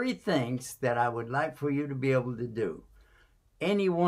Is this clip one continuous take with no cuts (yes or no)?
yes